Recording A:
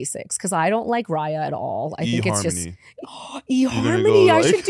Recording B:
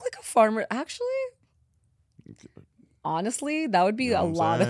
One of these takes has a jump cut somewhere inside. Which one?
A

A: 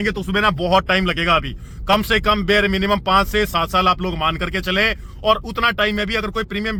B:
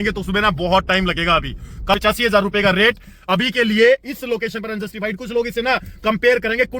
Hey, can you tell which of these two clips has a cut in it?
B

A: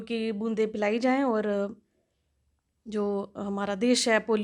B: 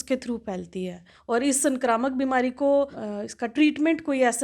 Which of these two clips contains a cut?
B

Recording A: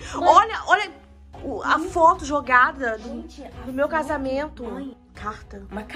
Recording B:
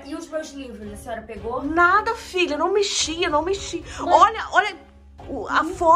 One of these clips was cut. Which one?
A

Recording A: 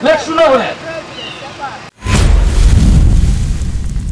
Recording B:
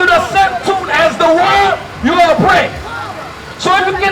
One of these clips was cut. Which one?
A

